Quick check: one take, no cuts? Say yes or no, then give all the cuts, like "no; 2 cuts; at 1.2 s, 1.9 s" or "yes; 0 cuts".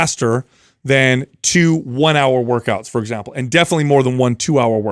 yes; 0 cuts